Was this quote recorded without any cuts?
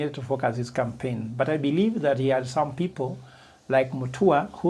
yes; 0 cuts

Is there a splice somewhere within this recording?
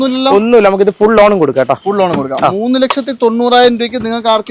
no; 0 cuts

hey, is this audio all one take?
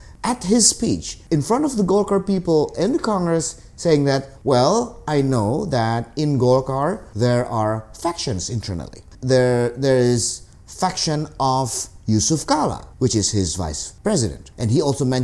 no; 5 cuts; at 1.1 s, 4.3 s, 7.1 s, 12.9 s, 14.2 s

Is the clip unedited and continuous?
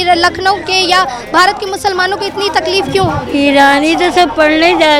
yes; 0 cuts

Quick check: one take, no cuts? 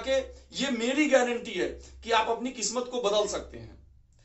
yes; 0 cuts

